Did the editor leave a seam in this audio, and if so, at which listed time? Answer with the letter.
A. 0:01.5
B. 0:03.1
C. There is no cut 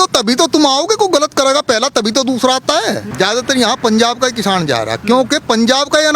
B